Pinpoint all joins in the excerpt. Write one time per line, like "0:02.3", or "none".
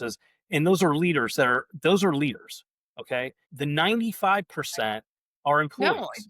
0:03.4